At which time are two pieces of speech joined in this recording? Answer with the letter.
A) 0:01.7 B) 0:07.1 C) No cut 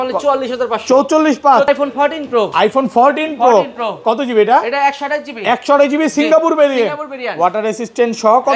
A